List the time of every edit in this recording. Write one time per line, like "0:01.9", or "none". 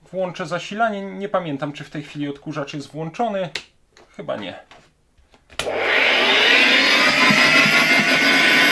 none